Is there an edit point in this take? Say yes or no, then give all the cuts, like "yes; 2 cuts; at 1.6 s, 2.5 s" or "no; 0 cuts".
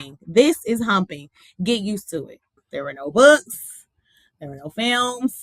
yes; 1 cut; at 2.6 s